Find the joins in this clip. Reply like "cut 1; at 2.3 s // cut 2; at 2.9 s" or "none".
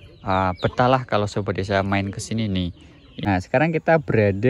cut 1; at 3.3 s